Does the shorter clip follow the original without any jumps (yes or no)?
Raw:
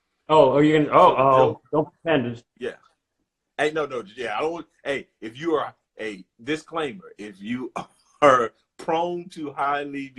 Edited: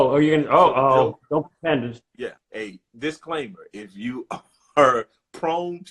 no